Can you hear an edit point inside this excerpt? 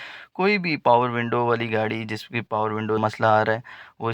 yes; 1 cut; at 3.1 s

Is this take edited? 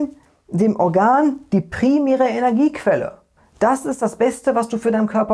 no; 0 cuts

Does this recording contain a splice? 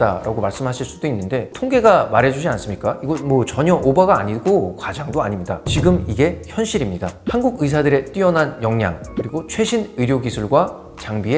no; 0 cuts

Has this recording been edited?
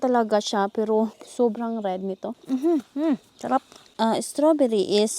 yes; 3 cuts; at 1.2 s, 2.4 s, 3.8 s

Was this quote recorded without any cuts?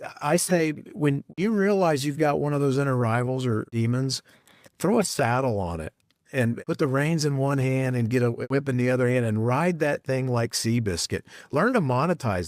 no; 4 cuts; at 1.3 s, 3.7 s, 6.6 s, 8.4 s

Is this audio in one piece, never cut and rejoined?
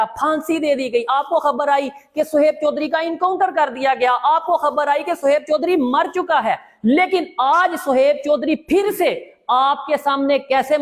yes; 0 cuts

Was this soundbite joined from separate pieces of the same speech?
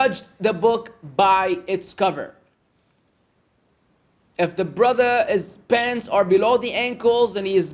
no; 0 cuts

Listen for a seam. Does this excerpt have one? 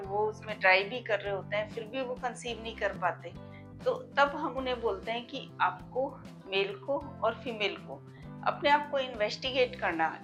no; 0 cuts

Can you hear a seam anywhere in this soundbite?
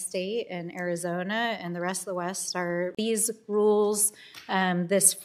no; 0 cuts

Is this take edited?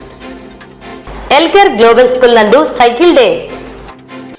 no; 0 cuts

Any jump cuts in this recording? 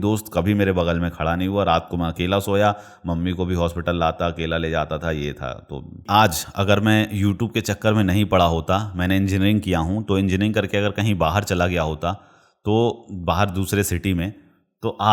yes; 1 cut; at 6.0 s

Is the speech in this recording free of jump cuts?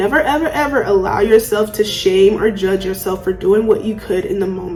yes; 0 cuts

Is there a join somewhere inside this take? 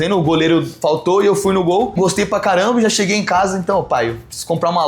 yes; 1 cut; at 2.0 s

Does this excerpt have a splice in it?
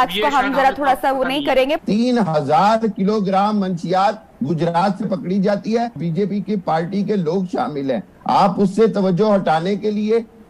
yes; 2 cuts; at 1.8 s, 6.0 s

